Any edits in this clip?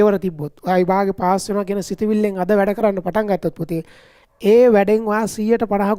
no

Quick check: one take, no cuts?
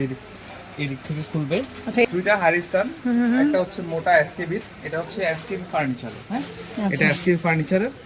no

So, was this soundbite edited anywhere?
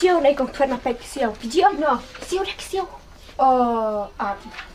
no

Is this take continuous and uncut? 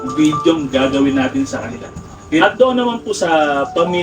no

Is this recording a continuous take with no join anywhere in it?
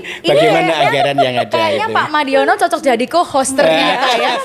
yes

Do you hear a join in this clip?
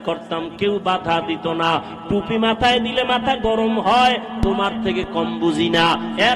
no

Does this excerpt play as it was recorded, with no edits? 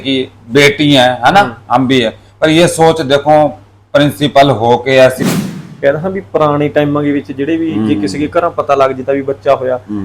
no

